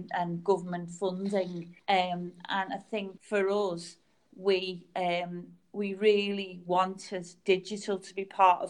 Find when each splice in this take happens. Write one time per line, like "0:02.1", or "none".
0:01.7
0:03.2